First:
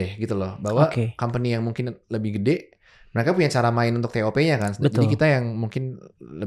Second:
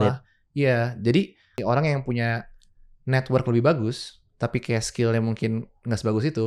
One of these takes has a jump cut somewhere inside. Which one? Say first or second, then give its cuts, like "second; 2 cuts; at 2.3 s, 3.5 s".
second; 1 cut; at 1.5 s